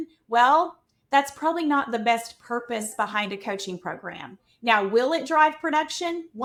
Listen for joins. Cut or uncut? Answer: uncut